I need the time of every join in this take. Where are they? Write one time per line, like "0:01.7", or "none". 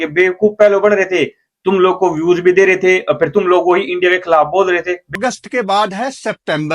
0:05.1